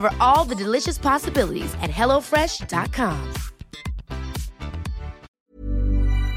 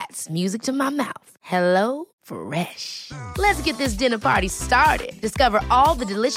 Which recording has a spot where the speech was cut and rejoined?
first; 1 cut; at 5.4 s

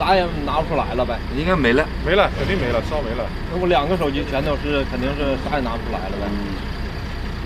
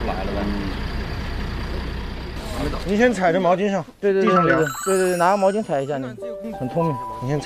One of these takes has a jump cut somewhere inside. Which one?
second; 1 cut; at 2.8 s

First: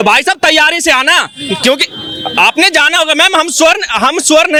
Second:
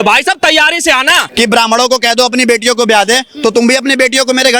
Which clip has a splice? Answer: second; 1 cut; at 1.3 s

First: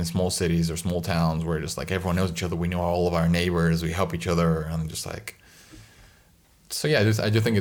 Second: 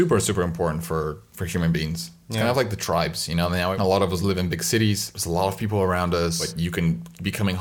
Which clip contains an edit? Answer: second; 4 cuts; at 1.3 s, 3.7 s, 5.1 s, 6.5 s

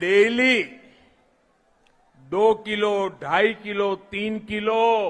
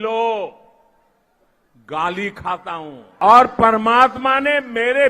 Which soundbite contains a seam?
second; 1 cut; at 3.0 s

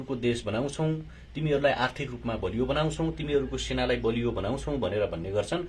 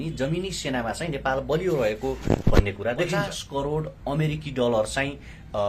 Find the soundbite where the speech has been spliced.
second; 1 cut; at 3.2 s

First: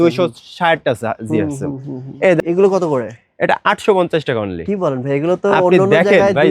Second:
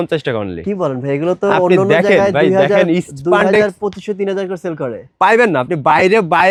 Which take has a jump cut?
first; 1 cut; at 2.4 s

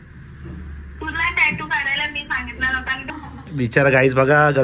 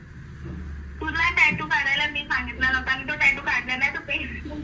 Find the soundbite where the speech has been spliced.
first; 1 cut; at 3.1 s

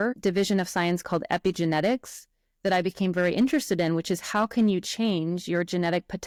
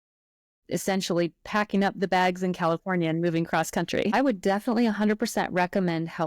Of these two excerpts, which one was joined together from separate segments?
second; 1 cut; at 4.1 s

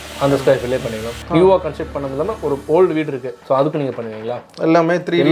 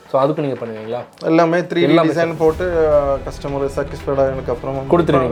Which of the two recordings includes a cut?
first; 1 cut; at 1.2 s

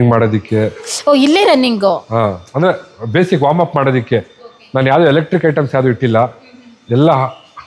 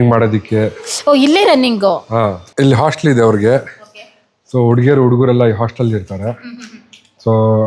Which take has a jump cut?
second; 1 cut; at 2.4 s

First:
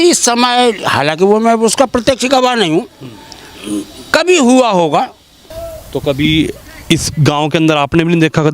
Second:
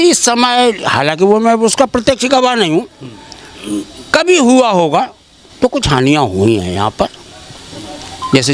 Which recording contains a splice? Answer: first; 1 cut; at 5.5 s

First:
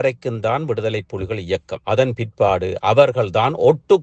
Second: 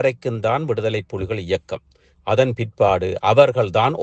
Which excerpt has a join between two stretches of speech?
first; 1 cut; at 1.7 s

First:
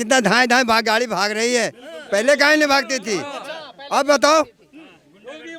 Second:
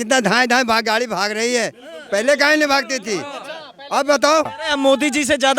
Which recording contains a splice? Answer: second; 1 cut; at 4.6 s

